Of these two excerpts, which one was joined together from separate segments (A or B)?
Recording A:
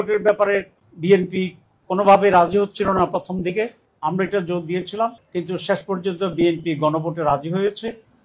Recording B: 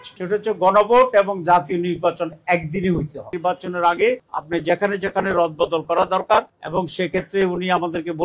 B